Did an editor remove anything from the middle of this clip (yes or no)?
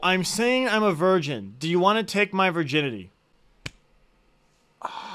no